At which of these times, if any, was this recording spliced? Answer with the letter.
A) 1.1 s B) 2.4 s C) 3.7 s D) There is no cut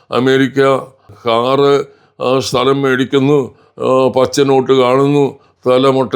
A